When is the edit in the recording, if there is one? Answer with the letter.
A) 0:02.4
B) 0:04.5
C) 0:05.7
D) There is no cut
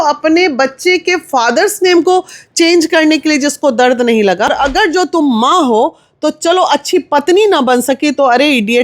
B